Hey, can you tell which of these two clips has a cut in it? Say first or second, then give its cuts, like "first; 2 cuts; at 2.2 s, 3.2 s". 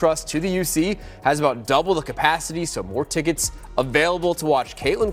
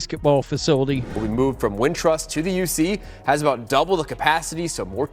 second; 1 cut; at 1.1 s